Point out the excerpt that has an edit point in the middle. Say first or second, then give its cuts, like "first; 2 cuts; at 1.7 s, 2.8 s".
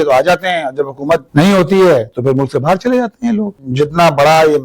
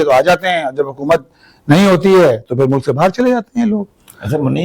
first; 2 cuts; at 1.3 s, 3.6 s